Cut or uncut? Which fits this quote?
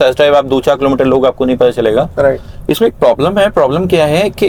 uncut